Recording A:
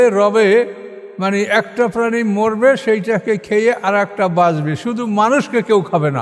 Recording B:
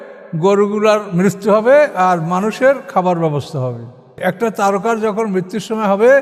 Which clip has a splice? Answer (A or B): B